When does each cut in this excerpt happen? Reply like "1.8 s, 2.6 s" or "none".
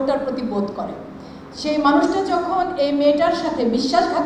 none